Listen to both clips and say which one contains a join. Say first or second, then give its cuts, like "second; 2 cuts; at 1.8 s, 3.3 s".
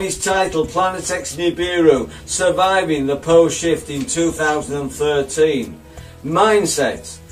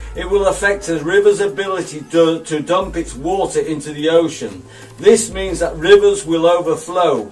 second; 1 cut; at 2.4 s